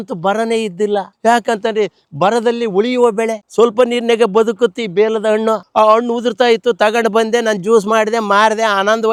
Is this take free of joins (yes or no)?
yes